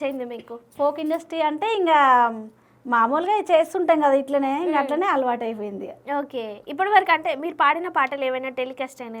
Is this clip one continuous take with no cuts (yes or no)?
yes